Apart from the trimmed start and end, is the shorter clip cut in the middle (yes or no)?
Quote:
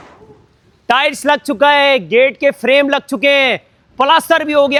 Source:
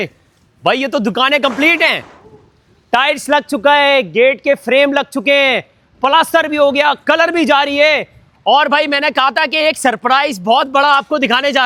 no